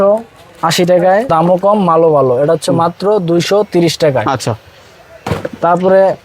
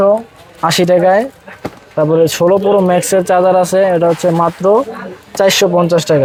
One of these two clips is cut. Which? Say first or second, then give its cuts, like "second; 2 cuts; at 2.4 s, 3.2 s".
first; 1 cut; at 1.3 s